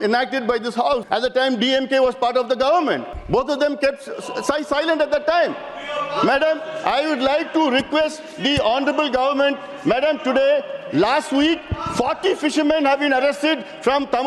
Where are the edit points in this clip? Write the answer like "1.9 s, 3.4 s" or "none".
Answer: 1.0 s, 3.1 s